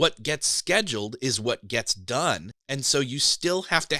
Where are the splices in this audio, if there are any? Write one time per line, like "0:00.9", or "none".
0:02.6